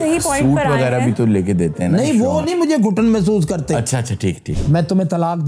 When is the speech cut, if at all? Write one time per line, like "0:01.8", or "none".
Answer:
0:04.5

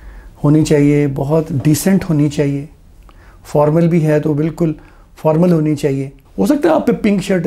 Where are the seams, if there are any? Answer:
0:06.2

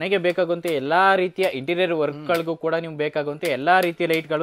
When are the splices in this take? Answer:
none

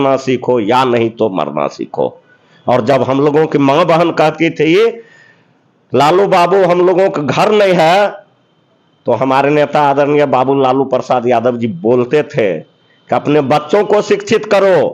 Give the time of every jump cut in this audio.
none

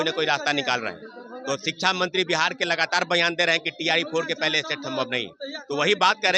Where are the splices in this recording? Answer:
none

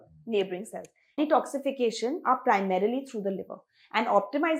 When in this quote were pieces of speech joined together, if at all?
0:01.1

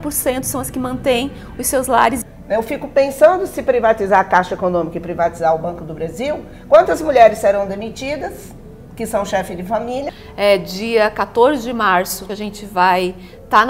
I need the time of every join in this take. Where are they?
0:02.3
0:10.2
0:12.2

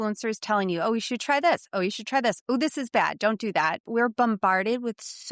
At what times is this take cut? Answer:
0:03.9

